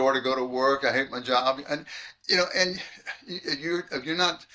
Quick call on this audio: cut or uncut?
uncut